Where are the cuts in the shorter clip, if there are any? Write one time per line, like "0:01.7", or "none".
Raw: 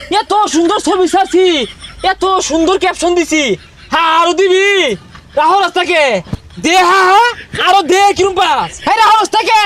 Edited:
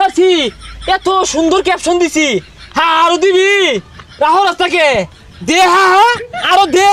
none